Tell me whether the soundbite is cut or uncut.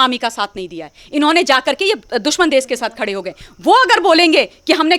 uncut